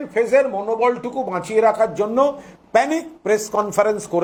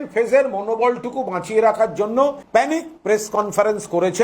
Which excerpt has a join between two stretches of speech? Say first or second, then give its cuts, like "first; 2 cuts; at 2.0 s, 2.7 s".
second; 1 cut; at 2.4 s